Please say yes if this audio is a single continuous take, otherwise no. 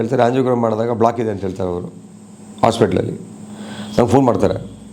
yes